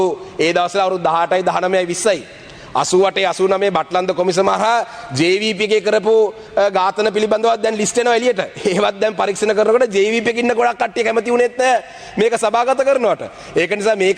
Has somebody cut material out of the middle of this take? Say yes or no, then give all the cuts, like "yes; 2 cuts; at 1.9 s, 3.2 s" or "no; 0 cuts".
no; 0 cuts